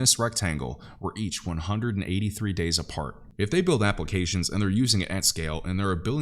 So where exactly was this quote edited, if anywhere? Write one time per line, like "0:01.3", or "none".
0:03.2